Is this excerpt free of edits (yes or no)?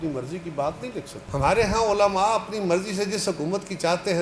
no